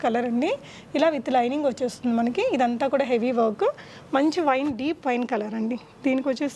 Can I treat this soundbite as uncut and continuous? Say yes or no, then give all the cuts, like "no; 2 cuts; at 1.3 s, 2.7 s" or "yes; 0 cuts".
yes; 0 cuts